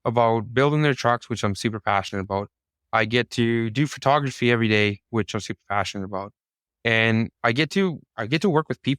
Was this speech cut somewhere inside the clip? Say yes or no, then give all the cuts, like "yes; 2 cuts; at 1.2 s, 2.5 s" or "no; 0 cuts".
no; 0 cuts